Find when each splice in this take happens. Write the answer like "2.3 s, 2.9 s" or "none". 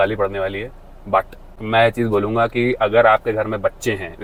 none

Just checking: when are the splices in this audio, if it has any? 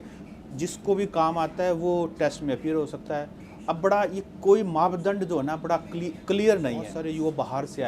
6.9 s

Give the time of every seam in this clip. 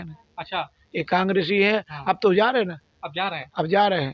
none

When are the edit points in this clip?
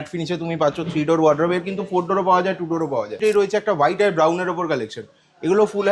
3.1 s

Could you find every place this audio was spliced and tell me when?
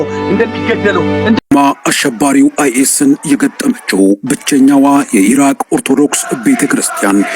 1.4 s

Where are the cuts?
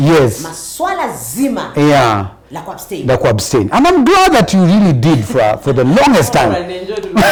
none

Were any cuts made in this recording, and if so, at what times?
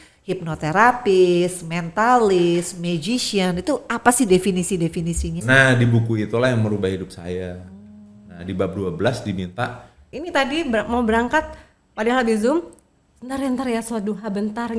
5.4 s, 10.1 s

